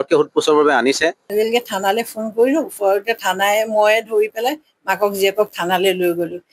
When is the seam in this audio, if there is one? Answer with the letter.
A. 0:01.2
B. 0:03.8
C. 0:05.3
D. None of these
A